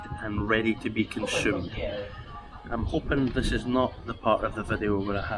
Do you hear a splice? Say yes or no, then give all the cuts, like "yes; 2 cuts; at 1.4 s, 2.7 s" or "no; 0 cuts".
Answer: no; 0 cuts